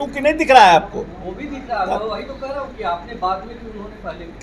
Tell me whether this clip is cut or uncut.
uncut